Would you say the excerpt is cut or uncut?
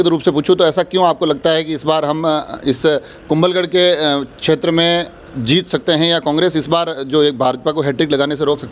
uncut